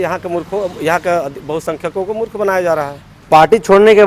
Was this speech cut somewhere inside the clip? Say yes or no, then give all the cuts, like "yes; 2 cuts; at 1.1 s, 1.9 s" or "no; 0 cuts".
no; 0 cuts